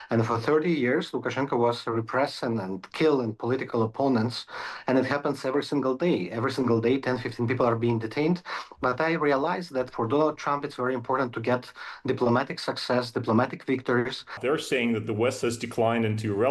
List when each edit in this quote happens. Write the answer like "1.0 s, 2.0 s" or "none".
14.4 s